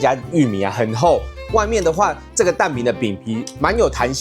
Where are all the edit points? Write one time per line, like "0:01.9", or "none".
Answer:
none